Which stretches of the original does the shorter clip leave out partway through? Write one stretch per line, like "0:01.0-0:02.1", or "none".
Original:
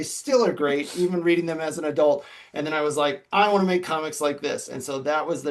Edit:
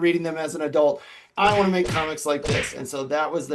0:02.5-0:03.2